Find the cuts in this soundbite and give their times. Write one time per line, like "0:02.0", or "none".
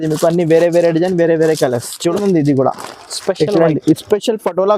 0:02.0